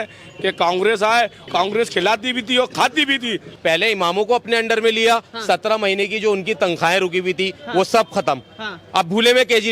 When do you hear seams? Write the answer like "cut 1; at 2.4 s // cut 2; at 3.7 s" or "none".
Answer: cut 1; at 1.4 s // cut 2; at 3.5 s